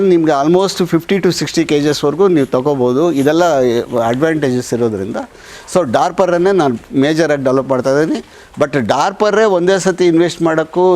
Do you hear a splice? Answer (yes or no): no